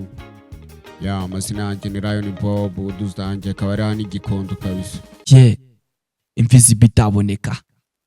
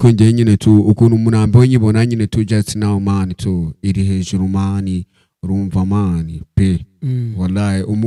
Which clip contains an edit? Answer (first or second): first